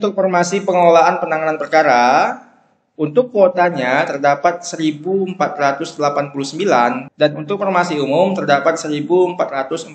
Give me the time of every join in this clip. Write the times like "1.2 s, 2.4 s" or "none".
none